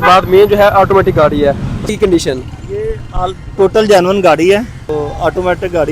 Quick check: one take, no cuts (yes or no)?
no